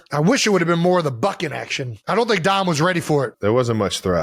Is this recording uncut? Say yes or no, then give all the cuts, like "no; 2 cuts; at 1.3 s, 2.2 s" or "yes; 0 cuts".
yes; 0 cuts